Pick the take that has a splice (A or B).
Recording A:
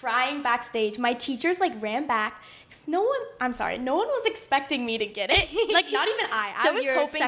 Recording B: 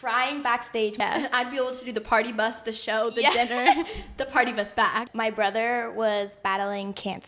B